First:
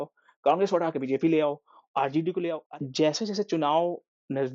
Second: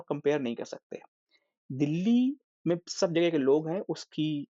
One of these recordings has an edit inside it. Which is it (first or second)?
first